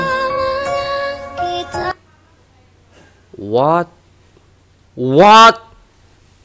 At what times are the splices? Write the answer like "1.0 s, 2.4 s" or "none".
none

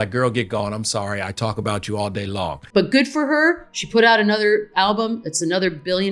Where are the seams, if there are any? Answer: 2.6 s

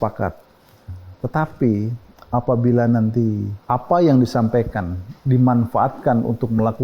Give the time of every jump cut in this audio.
3.5 s

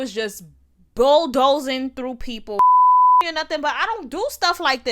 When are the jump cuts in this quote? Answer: 2.5 s, 3.2 s

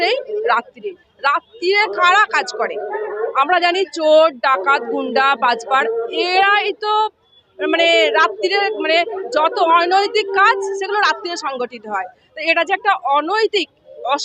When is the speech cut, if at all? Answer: none

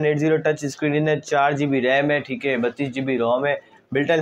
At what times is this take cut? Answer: none

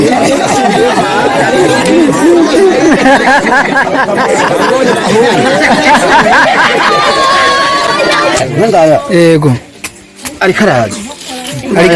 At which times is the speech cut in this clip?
7.9 s

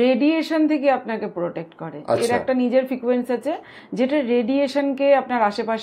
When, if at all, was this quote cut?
none

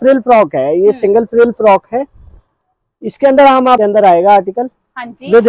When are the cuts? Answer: 3.8 s

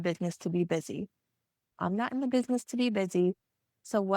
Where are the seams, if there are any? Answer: 1.7 s

